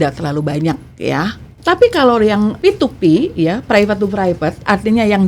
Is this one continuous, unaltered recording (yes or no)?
no